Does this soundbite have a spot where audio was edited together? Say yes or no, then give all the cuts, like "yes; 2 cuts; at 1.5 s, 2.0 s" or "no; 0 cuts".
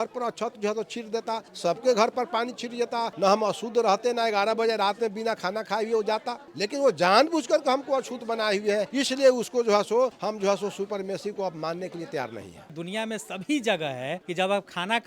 yes; 7 cuts; at 1.5 s, 3.1 s, 6.4 s, 8.9 s, 10.2 s, 12.8 s, 14.2 s